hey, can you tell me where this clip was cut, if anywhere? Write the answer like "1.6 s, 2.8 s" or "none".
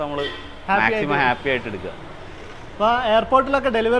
none

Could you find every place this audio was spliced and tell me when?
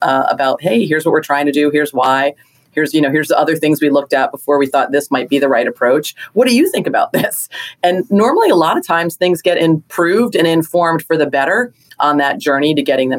9.6 s

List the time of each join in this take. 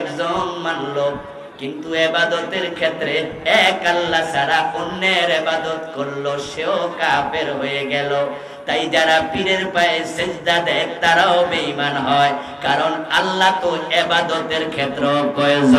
none

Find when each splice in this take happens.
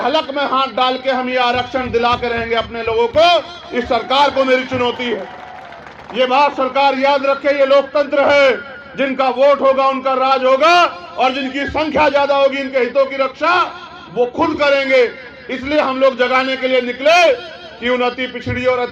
none

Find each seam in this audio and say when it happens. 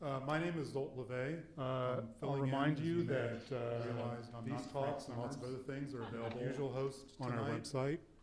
1.4 s

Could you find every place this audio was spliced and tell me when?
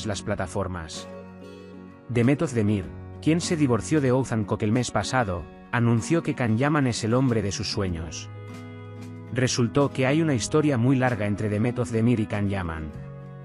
8.0 s, 9.3 s

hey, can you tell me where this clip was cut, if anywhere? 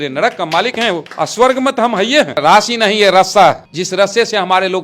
1.1 s, 2.4 s, 3.7 s

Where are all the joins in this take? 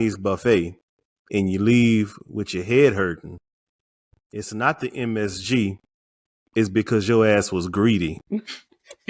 none

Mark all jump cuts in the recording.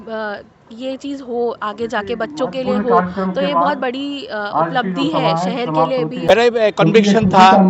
6.5 s

